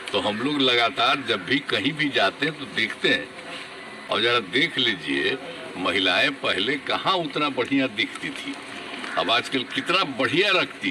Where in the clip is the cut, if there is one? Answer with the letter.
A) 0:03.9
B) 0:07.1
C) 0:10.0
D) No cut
A